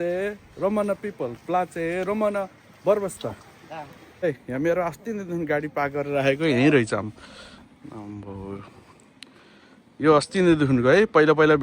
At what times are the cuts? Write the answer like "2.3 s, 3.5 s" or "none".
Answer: 4.2 s